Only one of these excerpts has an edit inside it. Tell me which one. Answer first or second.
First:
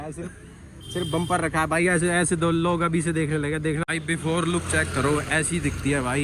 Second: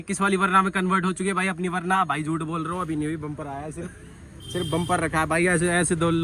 first